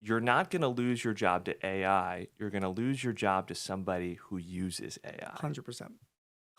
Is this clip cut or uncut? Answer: uncut